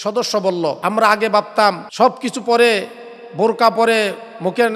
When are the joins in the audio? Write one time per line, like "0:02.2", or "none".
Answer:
0:00.8
0:01.8